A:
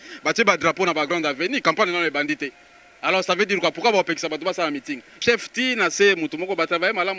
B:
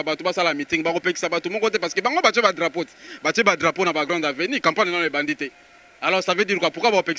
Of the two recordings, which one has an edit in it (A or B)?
A